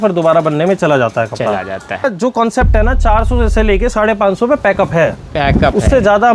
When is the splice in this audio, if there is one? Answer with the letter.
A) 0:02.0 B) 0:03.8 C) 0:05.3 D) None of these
A